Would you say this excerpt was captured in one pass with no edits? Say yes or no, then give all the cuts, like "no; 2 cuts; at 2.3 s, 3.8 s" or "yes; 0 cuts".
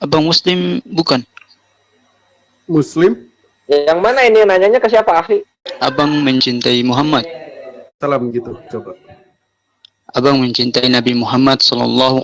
no; 2 cuts; at 5.6 s, 8.0 s